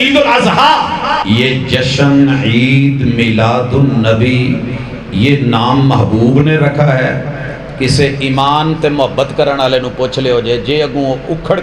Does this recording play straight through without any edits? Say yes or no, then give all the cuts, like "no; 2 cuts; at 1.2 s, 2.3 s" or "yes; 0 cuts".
no; 1 cut; at 1.2 s